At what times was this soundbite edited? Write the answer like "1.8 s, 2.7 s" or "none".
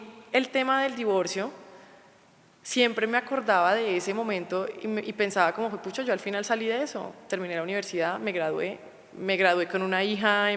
none